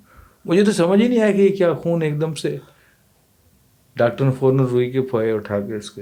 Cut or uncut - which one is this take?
uncut